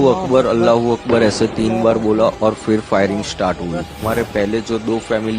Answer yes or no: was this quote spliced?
yes